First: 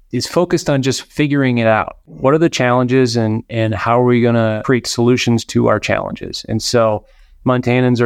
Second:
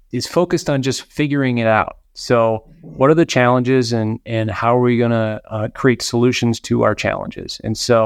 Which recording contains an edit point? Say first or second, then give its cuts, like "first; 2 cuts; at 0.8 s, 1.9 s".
first; 2 cuts; at 2.0 s, 4.6 s